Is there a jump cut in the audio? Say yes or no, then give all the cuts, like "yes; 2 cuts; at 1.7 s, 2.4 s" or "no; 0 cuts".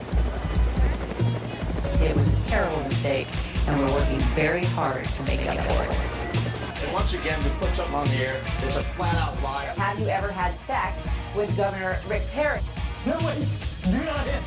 no; 0 cuts